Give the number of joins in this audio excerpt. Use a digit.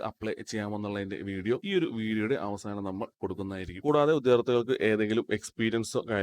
1